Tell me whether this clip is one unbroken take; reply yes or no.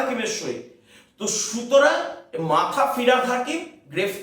yes